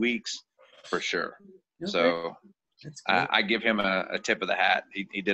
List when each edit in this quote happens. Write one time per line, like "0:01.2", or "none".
none